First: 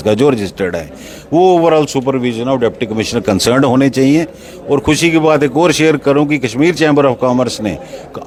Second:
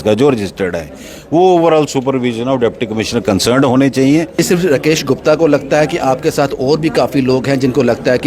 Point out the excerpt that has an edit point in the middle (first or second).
second